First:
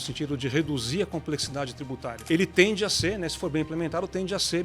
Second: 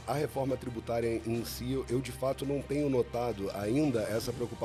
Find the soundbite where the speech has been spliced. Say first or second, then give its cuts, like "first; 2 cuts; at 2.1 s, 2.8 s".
first; 1 cut; at 2.1 s